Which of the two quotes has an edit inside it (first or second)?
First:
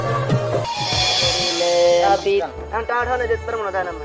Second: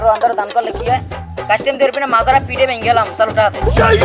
first